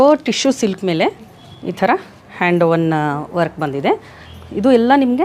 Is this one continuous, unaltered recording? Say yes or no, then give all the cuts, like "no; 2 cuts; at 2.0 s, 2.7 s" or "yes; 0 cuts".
no; 1 cut; at 4.3 s